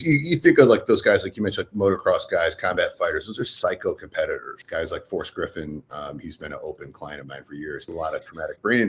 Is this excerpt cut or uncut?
cut